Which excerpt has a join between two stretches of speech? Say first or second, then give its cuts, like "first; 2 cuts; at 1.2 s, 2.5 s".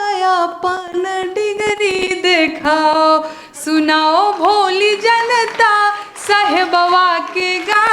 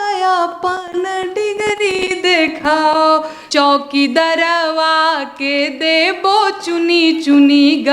second; 1 cut; at 3.4 s